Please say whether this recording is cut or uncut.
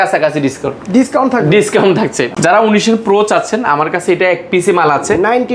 uncut